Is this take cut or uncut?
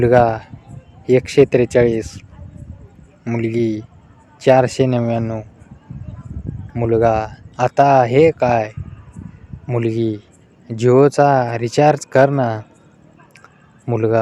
uncut